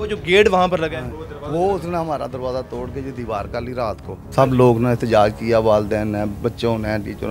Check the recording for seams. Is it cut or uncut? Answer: cut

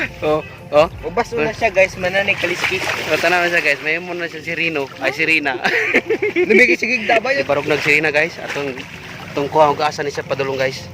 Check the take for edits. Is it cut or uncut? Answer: cut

